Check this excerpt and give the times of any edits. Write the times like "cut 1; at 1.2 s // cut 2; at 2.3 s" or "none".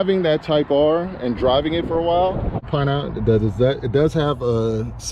cut 1; at 2.6 s